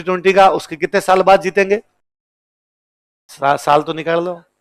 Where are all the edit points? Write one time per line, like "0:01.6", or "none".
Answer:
none